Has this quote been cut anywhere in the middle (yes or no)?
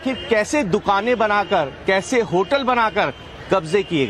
yes